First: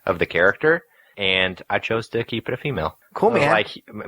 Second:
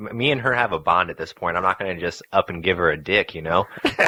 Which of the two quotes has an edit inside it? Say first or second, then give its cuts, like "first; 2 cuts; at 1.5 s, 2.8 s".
first; 2 cuts; at 1.1 s, 3.0 s